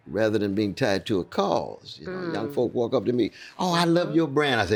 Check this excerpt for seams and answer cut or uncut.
uncut